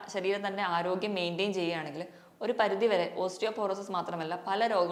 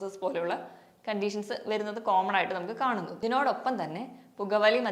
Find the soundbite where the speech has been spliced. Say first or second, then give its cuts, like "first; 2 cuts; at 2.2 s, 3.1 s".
second; 1 cut; at 3.1 s